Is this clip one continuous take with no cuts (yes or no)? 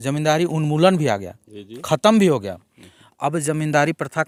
yes